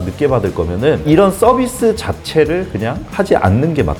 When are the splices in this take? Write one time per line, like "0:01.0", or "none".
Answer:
none